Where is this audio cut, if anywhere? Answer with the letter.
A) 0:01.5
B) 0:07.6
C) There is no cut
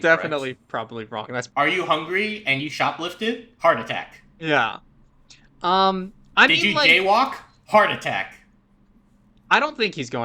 A